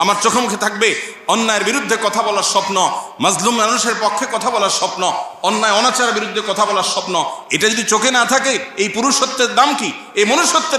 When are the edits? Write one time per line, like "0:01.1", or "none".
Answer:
none

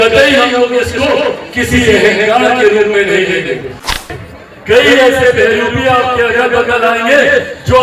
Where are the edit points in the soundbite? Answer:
0:03.9

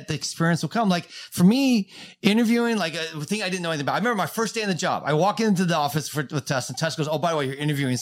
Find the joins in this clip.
none

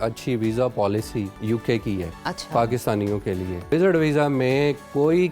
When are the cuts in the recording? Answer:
0:01.3
0:02.1
0:03.7

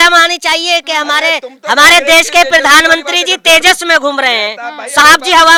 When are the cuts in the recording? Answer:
none

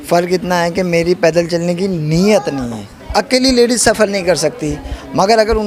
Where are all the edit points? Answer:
0:02.9

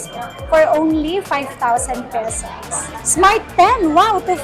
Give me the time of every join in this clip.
0:03.0

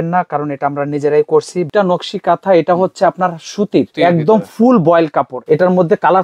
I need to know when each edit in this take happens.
0:01.7
0:03.9
0:05.4

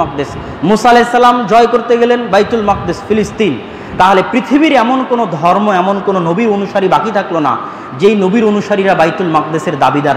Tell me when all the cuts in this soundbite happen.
none

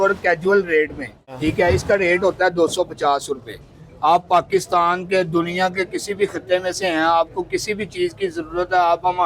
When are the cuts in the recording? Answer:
none

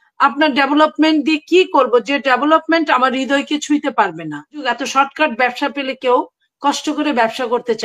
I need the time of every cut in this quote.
0:04.7

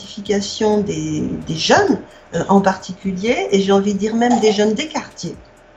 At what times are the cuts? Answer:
none

